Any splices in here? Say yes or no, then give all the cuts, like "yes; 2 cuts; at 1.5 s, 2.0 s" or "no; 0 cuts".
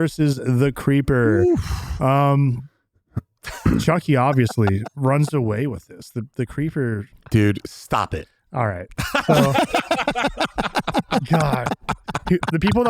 no; 0 cuts